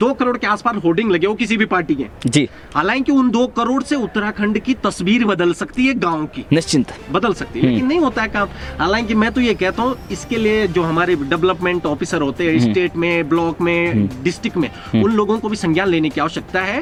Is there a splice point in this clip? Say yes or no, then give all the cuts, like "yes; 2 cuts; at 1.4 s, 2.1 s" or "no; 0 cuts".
no; 0 cuts